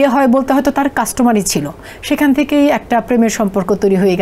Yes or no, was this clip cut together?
no